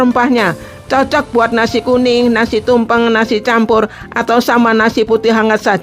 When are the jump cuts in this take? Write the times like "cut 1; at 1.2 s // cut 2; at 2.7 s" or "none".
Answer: none